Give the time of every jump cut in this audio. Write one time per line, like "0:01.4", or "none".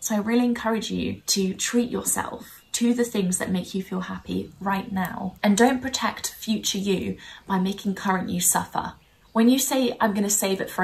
0:01.2
0:05.3